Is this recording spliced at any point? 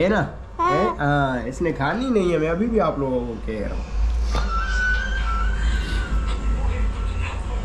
no; 0 cuts

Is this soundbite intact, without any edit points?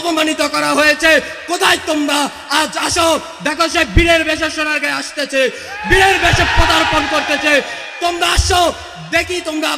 yes; 0 cuts

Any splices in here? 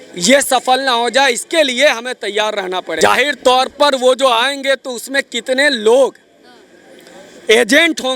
yes; 1 cut; at 2.9 s

